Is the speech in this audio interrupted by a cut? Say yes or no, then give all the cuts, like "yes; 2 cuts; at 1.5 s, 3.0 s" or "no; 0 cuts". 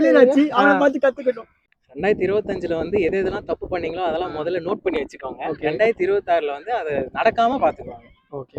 yes; 1 cut; at 1.6 s